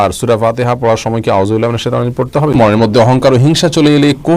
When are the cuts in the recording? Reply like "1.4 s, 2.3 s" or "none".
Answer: 2.4 s